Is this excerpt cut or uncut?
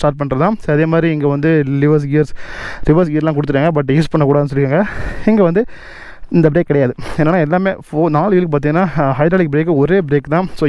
uncut